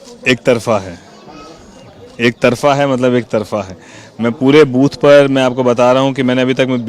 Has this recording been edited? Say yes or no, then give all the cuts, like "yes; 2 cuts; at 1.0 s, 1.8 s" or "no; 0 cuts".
no; 0 cuts